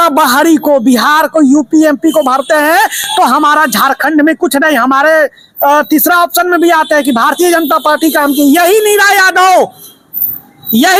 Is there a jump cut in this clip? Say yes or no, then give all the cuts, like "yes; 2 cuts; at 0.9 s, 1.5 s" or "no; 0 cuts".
no; 0 cuts